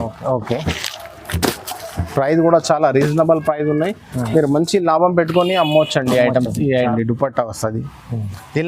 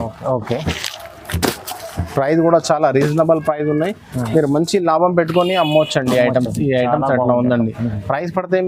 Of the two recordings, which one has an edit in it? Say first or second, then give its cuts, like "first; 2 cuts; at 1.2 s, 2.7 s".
first; 1 cut; at 6.9 s